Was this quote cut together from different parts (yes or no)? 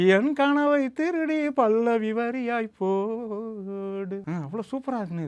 yes